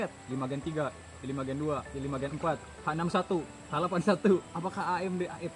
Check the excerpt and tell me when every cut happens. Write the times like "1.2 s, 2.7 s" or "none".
none